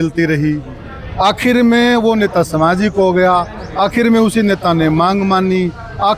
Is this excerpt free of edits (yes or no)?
yes